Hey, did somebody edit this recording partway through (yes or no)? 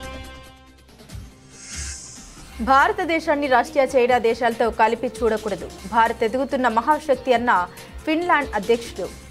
yes